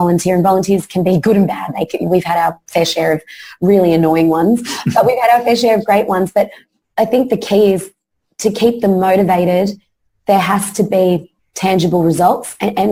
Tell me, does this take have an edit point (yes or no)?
no